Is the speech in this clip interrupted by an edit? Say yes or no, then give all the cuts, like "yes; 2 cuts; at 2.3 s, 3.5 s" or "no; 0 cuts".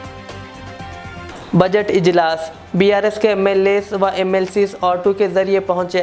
no; 0 cuts